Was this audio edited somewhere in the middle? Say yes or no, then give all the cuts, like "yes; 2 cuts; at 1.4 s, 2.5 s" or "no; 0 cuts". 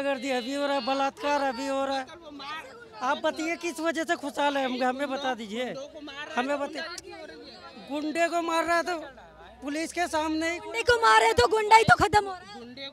no; 0 cuts